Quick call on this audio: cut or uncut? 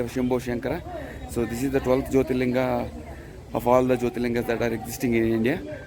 uncut